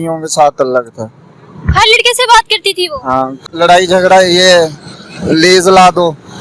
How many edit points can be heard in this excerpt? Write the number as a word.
one